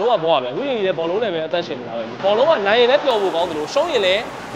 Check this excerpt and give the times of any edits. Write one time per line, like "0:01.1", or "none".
0:02.2